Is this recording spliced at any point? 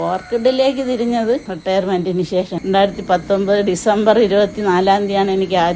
yes; 2 cuts; at 1.5 s, 2.5 s

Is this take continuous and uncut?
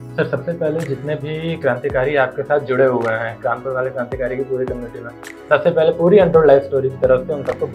yes; 0 cuts

